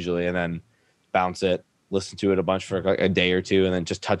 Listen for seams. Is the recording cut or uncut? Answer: cut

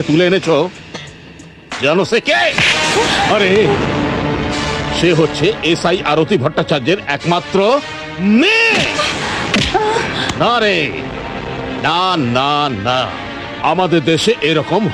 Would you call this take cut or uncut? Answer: uncut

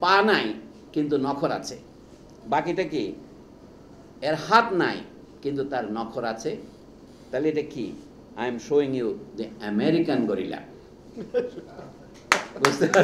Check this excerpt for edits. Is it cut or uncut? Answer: uncut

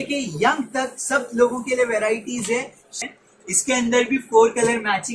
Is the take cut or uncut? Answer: cut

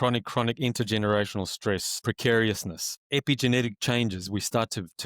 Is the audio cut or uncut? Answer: cut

